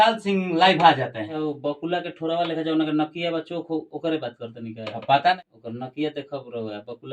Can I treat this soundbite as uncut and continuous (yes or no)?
no